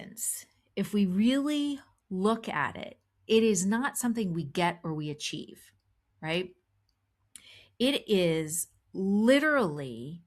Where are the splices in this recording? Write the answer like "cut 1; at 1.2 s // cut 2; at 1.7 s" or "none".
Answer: none